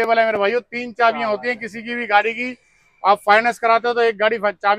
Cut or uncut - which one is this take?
uncut